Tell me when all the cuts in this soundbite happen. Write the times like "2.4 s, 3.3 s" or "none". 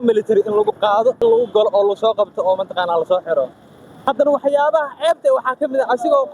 1.2 s, 3.9 s